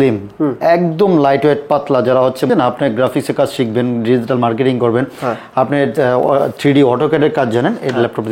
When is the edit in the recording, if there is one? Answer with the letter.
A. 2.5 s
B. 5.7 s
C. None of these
A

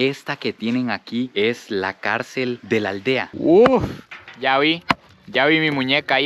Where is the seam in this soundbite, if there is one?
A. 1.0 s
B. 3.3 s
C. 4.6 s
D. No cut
B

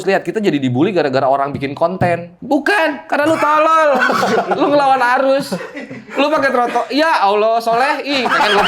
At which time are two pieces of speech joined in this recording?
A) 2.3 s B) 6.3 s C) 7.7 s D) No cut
A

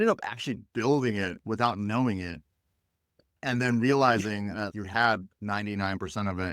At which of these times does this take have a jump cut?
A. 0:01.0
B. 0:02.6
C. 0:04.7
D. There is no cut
C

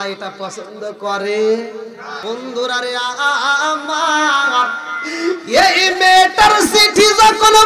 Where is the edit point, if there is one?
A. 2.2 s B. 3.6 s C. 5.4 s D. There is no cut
A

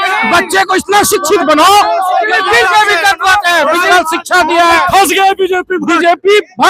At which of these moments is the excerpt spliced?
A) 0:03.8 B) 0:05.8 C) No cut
A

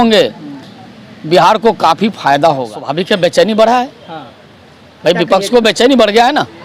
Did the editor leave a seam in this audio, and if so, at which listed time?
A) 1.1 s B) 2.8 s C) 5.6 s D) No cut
B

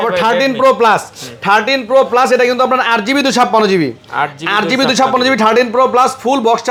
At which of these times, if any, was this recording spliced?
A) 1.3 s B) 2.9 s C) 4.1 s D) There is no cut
D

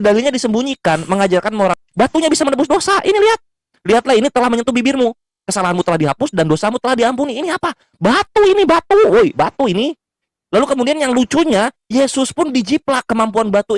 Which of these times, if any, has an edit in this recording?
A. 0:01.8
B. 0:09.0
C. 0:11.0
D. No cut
A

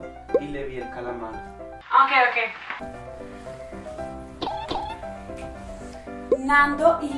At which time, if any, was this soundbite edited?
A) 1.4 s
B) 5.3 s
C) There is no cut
A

